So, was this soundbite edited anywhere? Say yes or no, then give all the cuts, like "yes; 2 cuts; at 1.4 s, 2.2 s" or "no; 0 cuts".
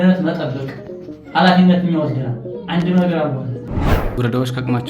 yes; 1 cut; at 4.0 s